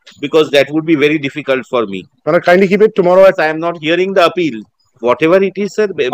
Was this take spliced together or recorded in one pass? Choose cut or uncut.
cut